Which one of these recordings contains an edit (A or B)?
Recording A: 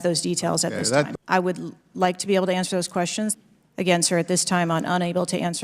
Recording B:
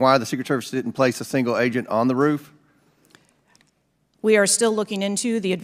A